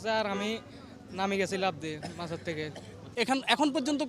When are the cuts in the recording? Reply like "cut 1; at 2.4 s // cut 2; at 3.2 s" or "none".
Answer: cut 1; at 3.0 s

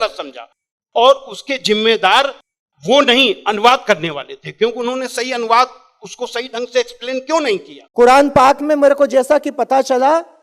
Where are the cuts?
cut 1; at 7.8 s

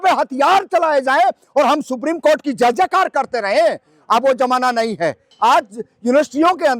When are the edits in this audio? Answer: cut 1; at 5.2 s

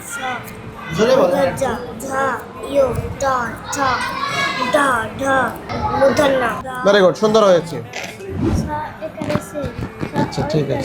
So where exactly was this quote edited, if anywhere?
cut 1; at 5.7 s // cut 2; at 8.4 s

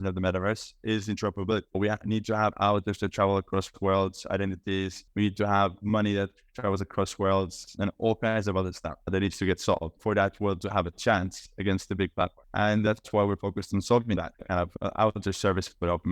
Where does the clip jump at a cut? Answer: cut 1; at 12.9 s // cut 2; at 14.4 s

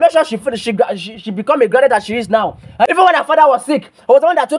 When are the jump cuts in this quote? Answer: cut 1; at 2.9 s

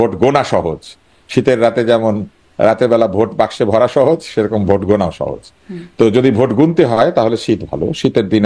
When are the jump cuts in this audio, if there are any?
none

